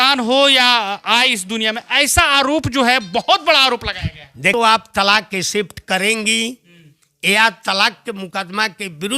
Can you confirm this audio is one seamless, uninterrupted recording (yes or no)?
no